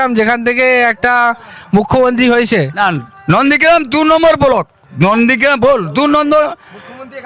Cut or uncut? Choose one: uncut